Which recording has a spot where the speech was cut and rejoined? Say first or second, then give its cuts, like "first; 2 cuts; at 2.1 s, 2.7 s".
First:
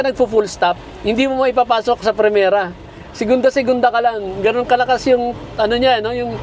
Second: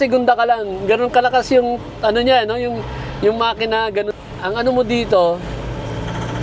second; 1 cut; at 4.1 s